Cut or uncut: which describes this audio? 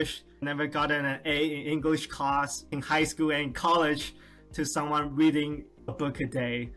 uncut